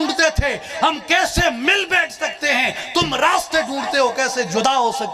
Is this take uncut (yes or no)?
yes